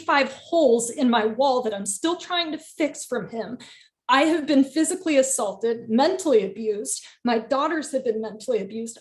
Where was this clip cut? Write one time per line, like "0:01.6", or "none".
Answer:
none